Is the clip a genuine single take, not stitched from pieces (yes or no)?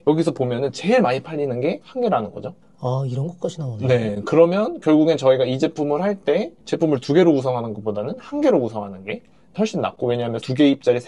yes